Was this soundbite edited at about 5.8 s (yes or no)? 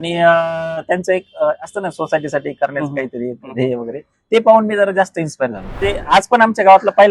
yes